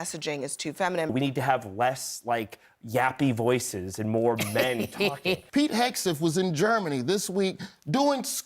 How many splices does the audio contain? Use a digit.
2